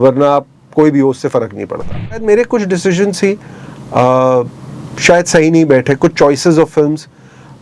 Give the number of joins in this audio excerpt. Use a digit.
1